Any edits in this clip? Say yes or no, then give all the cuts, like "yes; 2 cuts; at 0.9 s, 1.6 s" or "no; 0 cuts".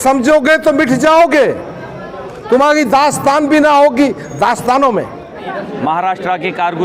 yes; 1 cut; at 5.4 s